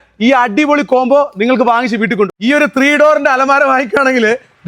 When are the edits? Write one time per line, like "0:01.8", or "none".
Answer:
0:02.3